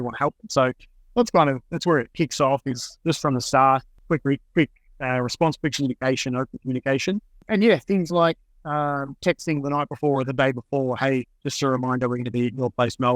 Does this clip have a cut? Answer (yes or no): no